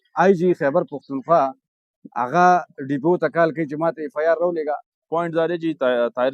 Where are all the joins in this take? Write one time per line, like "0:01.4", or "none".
0:04.9

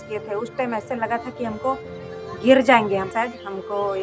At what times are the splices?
0:03.1

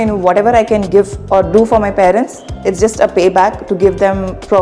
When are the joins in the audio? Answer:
none

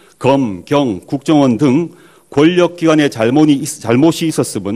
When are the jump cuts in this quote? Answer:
0:03.5

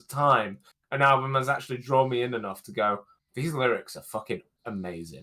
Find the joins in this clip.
none

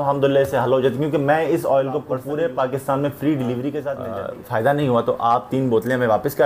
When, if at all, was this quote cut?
0:02.1
0:04.0

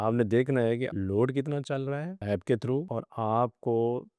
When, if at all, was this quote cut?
0:00.9
0:02.2
0:02.9

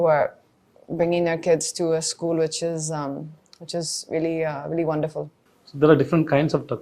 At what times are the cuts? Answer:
0:05.4

